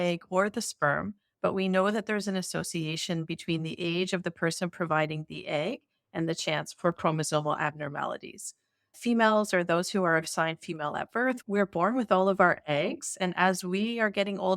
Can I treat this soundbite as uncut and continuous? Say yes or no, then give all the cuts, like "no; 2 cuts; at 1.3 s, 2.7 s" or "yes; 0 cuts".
no; 1 cut; at 11.4 s